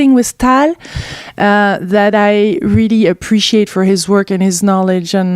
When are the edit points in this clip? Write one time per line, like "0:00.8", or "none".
0:01.0